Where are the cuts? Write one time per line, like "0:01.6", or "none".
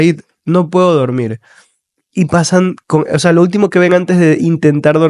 none